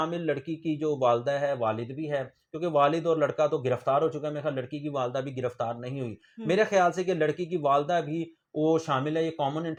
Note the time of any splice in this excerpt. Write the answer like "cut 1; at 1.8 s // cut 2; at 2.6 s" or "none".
none